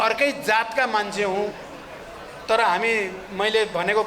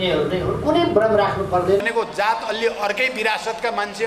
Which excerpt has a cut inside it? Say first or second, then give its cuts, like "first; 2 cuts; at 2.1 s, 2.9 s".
second; 1 cut; at 1.8 s